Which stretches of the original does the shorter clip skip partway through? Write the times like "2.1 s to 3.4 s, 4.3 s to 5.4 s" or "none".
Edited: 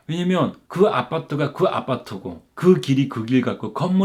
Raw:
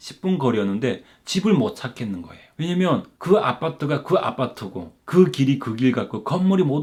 none

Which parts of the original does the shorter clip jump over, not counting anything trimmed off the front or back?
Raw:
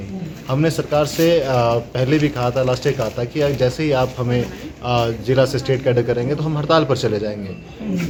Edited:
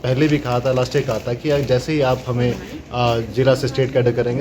none

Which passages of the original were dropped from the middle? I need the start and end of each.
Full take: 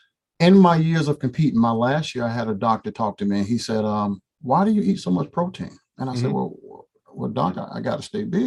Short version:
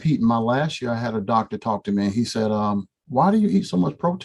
none

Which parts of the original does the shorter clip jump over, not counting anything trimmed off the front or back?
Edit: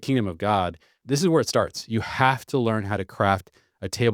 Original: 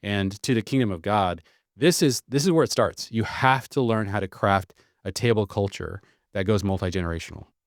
1.6 s to 2.2 s

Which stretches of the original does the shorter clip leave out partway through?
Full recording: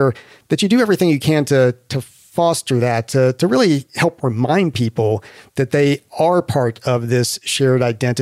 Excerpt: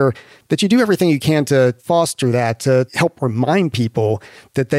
1.8 s to 2.3 s, 3.4 s to 3.9 s

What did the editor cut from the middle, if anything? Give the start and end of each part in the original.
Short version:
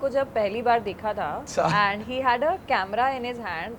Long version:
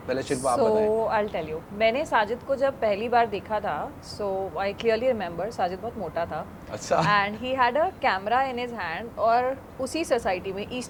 3.9 s to 6.8 s

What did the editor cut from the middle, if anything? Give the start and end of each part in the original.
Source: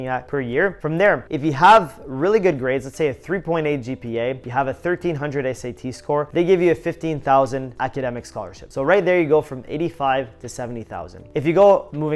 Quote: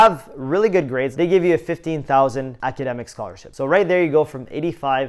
2.8 s to 6.3 s

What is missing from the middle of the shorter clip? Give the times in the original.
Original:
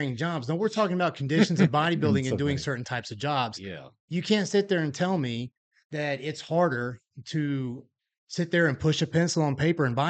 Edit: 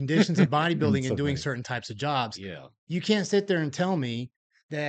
none

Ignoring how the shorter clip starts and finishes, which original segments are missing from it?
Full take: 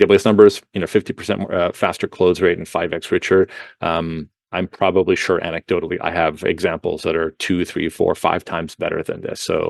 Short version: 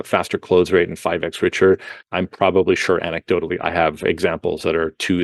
3.6 s to 4.4 s

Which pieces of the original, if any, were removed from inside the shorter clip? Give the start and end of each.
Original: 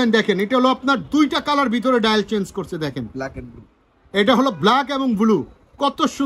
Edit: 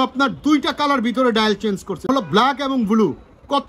2.8 s to 4.4 s

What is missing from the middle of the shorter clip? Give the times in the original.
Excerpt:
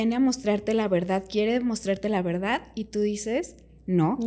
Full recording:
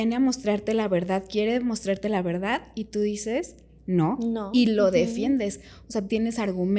none

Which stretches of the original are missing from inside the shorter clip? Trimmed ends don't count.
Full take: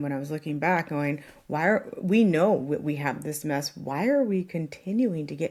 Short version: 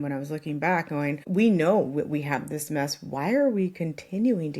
1.2 s to 2.0 s

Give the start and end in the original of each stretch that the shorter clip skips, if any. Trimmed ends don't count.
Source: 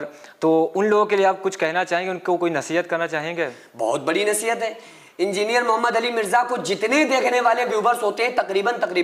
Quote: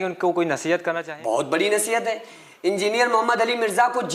3.1 s to 3.6 s

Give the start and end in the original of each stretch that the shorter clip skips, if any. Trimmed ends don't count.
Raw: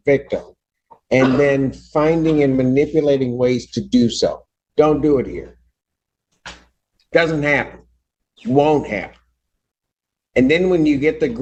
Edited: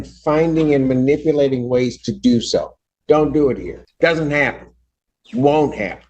5.5 s to 6.9 s

